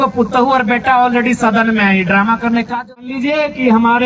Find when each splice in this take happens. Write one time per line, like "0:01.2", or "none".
0:03.1